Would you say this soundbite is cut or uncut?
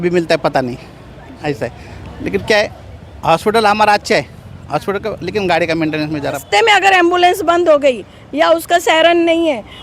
cut